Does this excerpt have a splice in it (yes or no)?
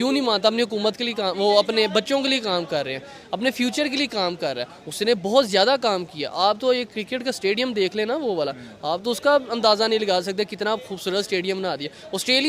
no